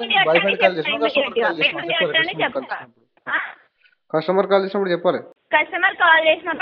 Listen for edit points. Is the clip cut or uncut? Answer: cut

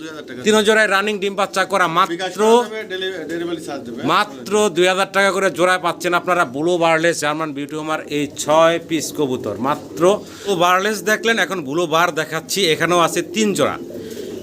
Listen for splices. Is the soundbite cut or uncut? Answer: cut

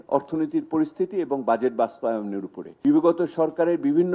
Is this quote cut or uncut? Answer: cut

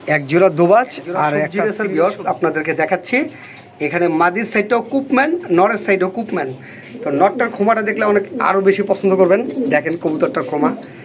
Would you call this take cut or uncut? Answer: cut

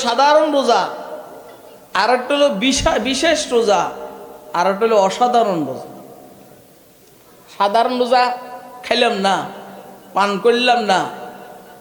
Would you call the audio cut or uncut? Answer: uncut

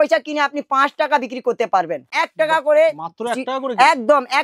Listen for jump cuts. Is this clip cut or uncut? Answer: cut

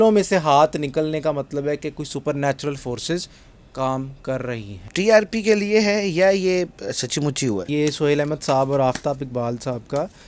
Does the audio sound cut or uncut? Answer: cut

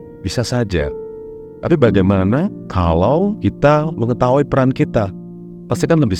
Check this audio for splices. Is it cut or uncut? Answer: cut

